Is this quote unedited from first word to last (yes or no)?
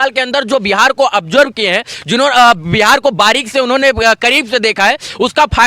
yes